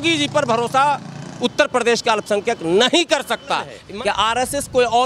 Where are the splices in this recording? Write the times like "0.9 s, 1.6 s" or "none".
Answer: 3.8 s